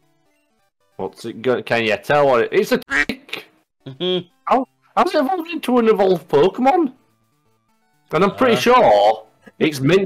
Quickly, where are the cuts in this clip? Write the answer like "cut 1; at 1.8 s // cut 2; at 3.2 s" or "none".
cut 1; at 2.8 s